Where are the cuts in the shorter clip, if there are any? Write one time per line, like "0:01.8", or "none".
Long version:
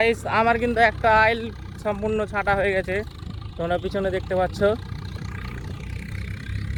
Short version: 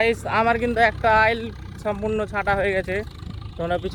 none